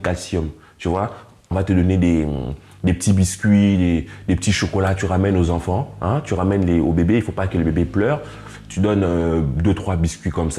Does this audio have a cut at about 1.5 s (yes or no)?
yes